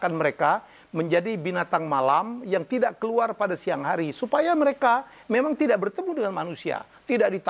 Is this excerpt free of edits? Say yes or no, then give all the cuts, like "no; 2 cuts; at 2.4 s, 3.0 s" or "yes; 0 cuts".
yes; 0 cuts